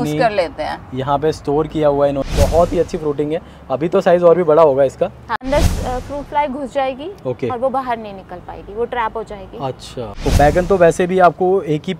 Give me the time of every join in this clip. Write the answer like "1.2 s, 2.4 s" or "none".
2.2 s, 5.4 s, 10.1 s